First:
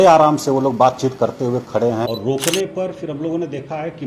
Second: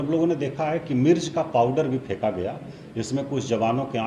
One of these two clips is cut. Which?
first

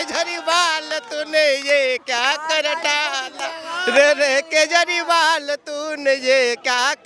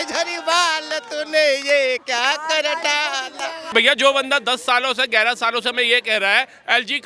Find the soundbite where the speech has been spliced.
second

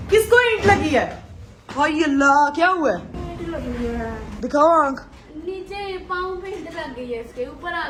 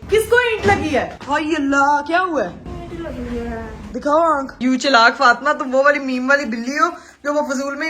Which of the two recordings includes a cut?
second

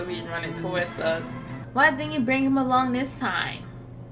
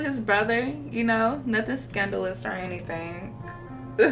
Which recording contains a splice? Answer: first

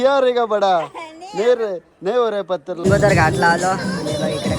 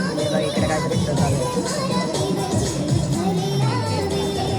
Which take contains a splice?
first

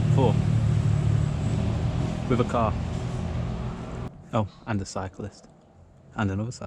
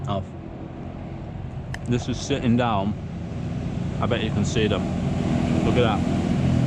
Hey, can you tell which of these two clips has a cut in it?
first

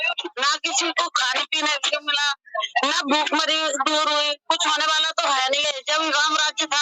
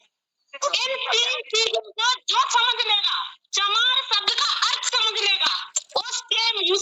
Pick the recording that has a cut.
first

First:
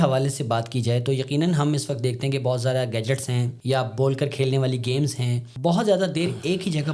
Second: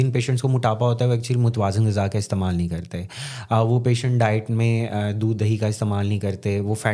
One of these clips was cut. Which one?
first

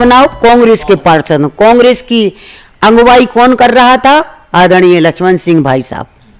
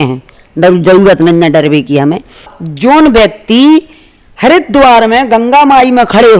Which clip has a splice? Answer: second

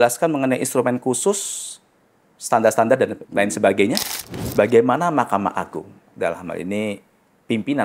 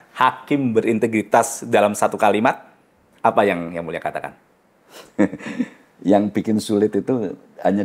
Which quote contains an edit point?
first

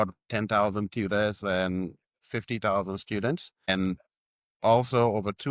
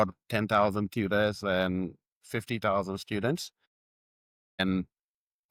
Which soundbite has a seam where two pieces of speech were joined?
first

